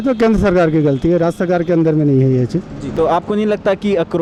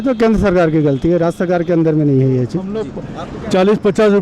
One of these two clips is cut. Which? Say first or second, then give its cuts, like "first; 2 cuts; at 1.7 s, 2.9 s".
second; 1 cut; at 2.9 s